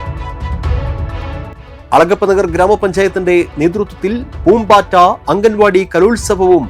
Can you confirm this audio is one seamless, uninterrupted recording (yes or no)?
no